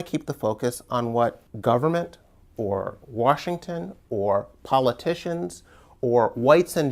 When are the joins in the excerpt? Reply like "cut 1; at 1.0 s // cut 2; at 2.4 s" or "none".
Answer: cut 1; at 1.5 s